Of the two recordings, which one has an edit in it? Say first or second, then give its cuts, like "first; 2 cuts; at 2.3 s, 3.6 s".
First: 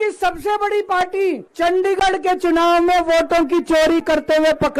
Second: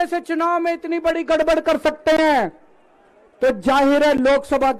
first; 1 cut; at 1.5 s